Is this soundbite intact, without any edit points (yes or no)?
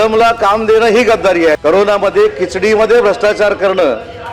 no